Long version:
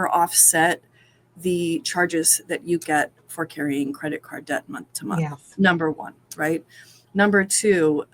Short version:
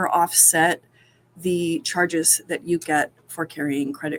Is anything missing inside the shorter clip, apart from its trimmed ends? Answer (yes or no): no